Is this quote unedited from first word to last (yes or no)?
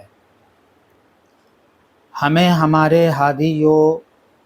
no